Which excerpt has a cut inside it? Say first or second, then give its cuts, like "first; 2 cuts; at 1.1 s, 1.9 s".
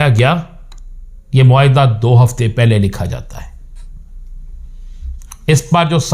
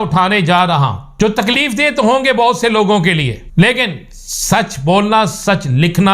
second; 2 cuts; at 1.0 s, 3.4 s